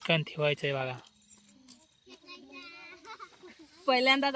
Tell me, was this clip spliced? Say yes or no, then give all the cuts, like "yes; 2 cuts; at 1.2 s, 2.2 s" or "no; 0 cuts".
no; 0 cuts